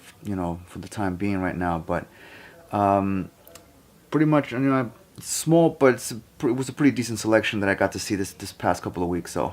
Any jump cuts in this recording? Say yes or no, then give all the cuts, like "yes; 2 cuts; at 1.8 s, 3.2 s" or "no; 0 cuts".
yes; 1 cut; at 6.1 s